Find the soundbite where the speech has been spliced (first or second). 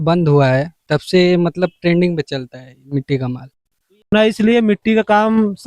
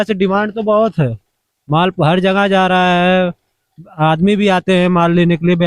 first